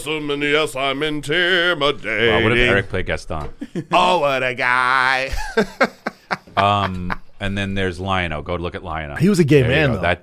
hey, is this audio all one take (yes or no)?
no